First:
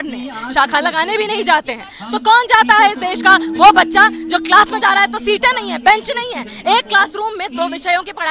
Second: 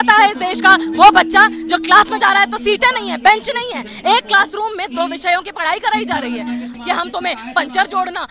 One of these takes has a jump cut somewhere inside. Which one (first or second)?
second